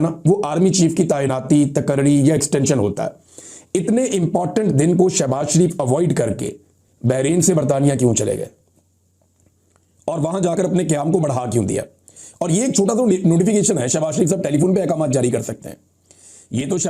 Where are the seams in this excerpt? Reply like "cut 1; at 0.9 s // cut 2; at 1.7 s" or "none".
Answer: none